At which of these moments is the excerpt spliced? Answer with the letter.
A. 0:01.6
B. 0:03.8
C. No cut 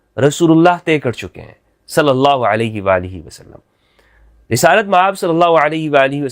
C